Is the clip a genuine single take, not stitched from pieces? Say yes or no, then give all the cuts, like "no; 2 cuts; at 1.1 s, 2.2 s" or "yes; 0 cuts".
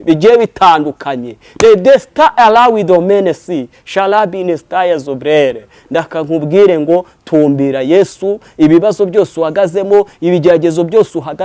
yes; 0 cuts